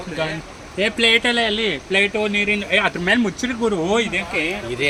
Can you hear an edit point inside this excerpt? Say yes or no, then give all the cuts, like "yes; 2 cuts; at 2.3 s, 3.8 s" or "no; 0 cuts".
no; 0 cuts